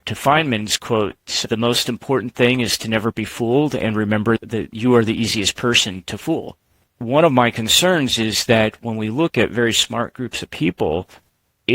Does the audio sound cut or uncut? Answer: cut